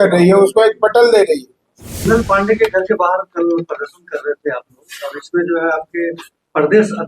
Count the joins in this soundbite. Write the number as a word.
one